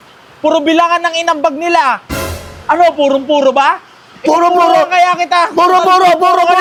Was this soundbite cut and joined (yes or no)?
no